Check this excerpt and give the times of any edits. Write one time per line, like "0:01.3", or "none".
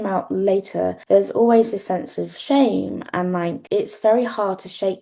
0:01.0
0:03.6